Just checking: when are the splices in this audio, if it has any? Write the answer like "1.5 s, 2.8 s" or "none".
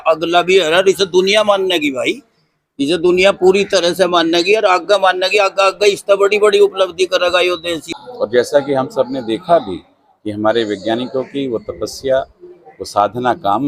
7.8 s